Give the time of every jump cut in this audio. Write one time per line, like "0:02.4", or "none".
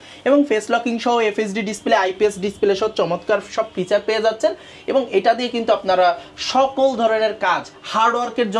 none